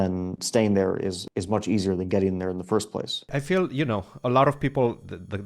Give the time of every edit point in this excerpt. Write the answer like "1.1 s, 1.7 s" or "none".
1.2 s, 3.3 s